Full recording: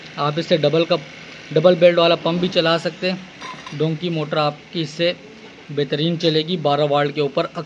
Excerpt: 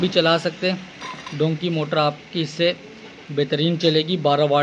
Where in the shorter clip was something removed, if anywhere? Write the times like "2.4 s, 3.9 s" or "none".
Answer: none